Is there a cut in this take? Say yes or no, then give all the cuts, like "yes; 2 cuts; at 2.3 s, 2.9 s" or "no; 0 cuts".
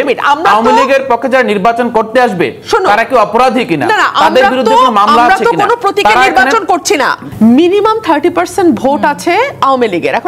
yes; 1 cut; at 7.2 s